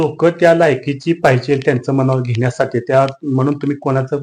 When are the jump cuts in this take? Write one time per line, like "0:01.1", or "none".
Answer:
none